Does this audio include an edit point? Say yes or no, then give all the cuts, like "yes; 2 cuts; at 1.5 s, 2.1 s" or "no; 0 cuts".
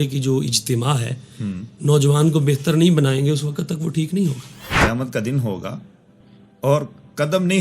yes; 1 cut; at 4.6 s